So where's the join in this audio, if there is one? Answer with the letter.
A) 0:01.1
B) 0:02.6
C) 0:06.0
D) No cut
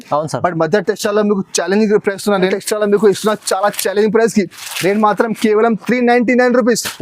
B